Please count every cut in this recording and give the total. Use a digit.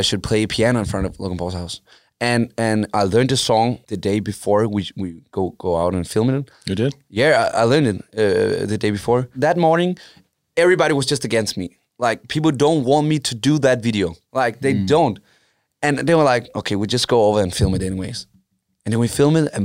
3